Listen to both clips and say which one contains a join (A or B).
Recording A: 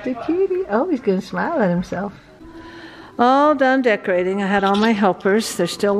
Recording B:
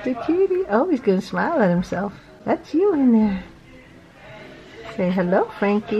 A